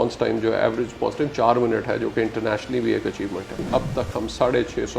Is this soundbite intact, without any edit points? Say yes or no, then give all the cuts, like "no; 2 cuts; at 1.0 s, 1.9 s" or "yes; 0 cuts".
no; 1 cut; at 3.6 s